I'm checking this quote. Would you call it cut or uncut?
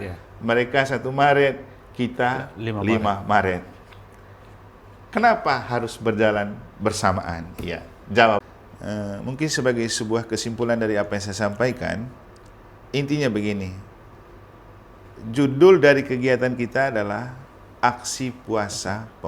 cut